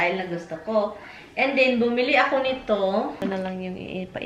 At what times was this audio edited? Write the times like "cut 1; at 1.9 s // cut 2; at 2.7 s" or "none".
cut 1; at 3.2 s